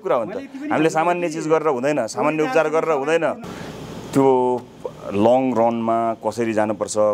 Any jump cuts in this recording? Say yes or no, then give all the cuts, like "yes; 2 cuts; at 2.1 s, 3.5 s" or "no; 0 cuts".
no; 0 cuts